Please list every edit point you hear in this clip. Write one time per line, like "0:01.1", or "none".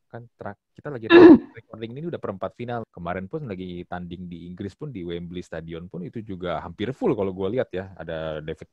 0:02.9